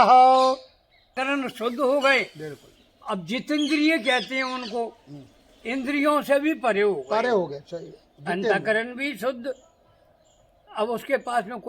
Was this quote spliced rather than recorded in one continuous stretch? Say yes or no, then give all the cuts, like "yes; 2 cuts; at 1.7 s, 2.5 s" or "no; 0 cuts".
yes; 1 cut; at 1.1 s